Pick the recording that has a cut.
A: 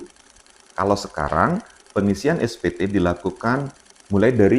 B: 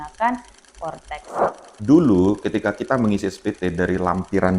B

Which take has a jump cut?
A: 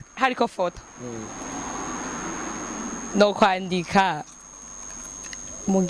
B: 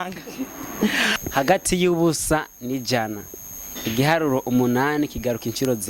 B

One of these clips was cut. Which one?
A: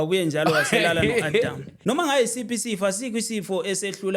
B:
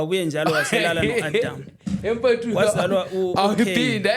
A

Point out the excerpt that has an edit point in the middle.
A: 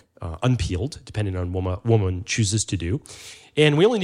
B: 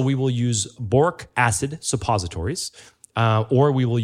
B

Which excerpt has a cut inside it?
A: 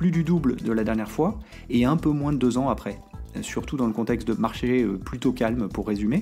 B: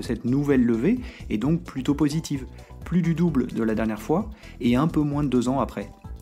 A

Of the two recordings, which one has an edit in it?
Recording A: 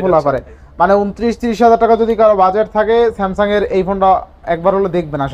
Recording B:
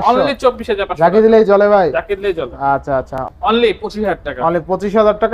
B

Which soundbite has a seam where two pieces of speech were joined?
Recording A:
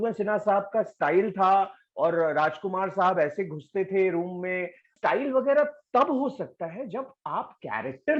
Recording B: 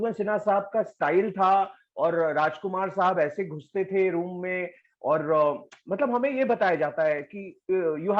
A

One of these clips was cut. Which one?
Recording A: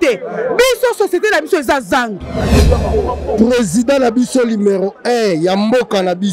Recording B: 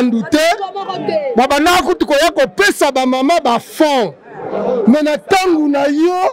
A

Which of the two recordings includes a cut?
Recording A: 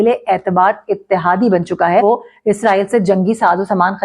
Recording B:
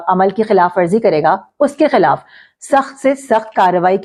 A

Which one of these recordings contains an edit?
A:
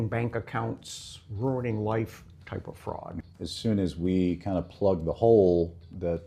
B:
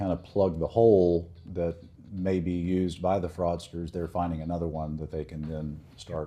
A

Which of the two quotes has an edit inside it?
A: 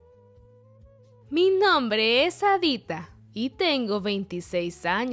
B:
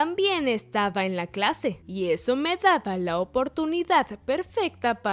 A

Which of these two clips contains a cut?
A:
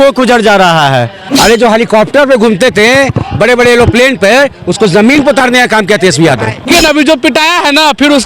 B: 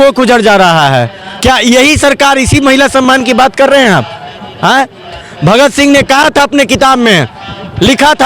A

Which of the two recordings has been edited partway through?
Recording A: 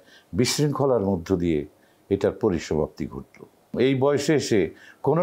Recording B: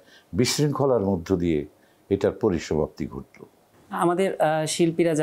A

